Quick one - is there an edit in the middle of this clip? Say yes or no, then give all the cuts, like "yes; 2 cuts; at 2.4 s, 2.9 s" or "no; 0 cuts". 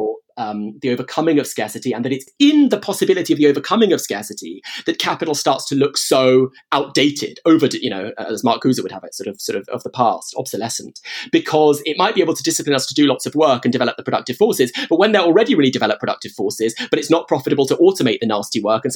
yes; 1 cut; at 2.3 s